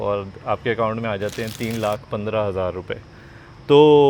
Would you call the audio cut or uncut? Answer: uncut